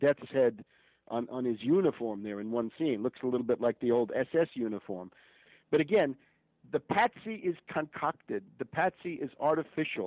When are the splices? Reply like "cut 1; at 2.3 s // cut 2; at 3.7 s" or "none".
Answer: cut 1; at 5.5 s